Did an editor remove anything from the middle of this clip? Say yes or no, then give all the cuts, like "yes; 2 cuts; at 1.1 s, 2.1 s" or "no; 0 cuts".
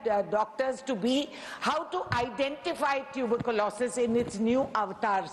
no; 0 cuts